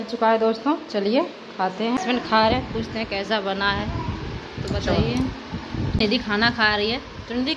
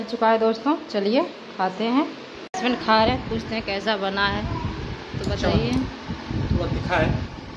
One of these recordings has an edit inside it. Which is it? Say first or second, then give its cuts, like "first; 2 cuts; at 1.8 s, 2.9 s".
first; 2 cuts; at 2.0 s, 5.9 s